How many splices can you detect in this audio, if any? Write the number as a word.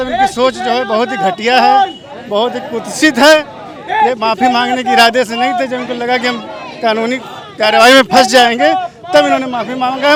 zero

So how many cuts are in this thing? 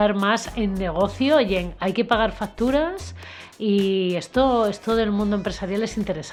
zero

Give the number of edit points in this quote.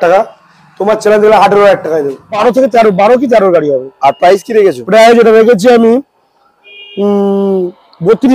one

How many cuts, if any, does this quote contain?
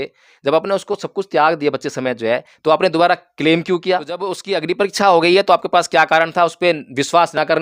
one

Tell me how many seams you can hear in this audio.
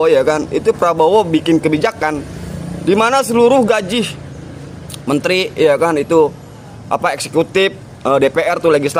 zero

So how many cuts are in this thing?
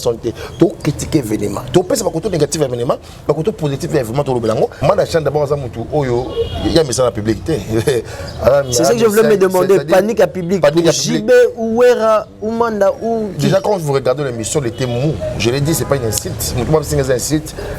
one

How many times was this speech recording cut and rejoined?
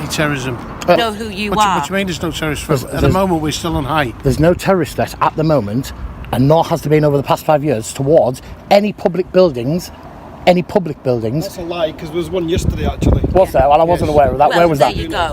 one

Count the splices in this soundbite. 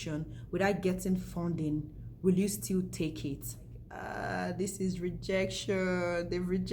one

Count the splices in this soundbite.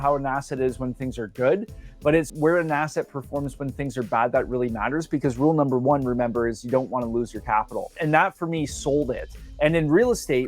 one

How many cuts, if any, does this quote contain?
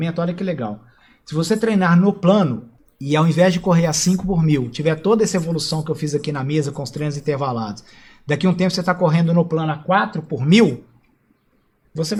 zero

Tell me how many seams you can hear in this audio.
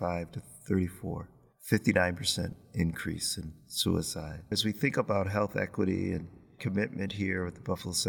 one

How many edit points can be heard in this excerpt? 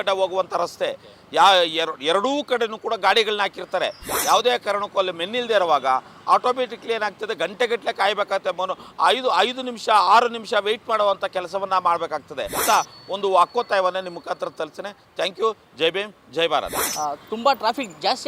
three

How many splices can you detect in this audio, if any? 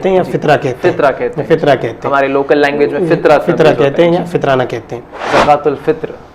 one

